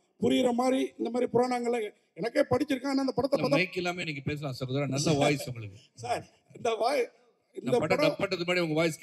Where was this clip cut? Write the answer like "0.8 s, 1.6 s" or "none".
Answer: none

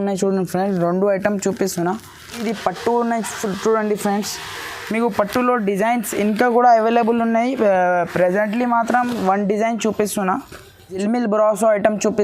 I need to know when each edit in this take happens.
2.4 s, 11.0 s

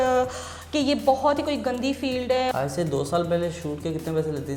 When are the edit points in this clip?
2.5 s

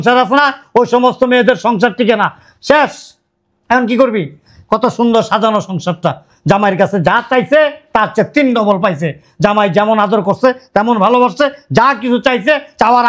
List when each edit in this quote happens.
none

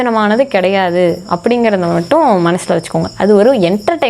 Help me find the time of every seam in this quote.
none

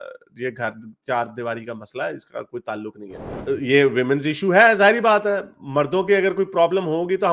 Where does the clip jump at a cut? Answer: 3.4 s

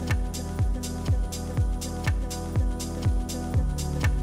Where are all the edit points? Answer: none

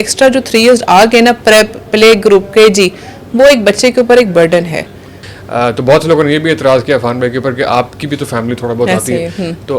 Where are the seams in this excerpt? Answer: 5.2 s

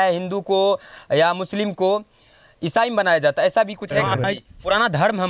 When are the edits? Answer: 4.1 s

